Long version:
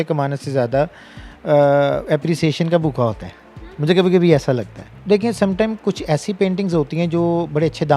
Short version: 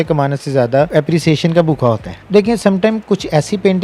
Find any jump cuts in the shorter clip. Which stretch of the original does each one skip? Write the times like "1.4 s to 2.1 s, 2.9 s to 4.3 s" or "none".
0.9 s to 2.1 s, 3.3 s to 4.9 s